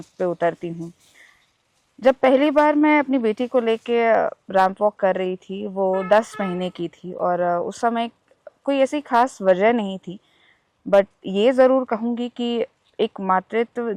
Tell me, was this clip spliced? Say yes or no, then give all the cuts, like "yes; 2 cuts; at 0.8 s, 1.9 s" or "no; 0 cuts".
no; 0 cuts